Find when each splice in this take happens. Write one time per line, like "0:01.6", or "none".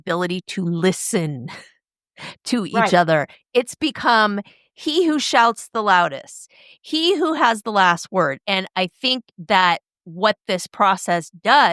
0:08.4